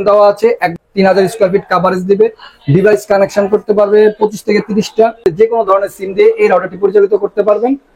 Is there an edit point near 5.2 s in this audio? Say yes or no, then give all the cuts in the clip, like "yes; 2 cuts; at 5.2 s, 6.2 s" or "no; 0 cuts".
yes; 2 cuts; at 0.8 s, 5.2 s